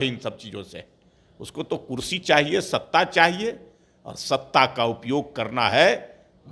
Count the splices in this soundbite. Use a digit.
0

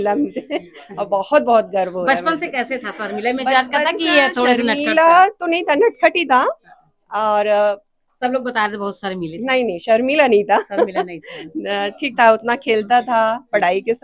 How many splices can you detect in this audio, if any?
0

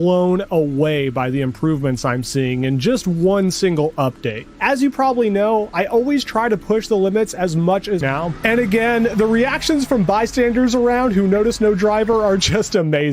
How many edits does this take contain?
1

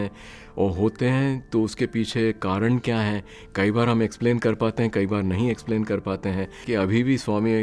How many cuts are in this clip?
1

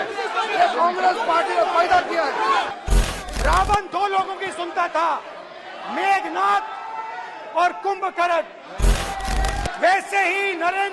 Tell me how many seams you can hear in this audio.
1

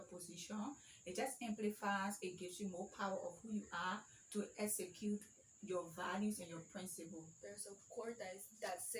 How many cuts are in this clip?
0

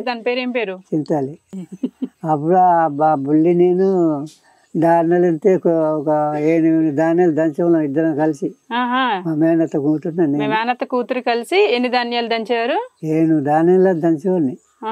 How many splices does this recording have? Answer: 1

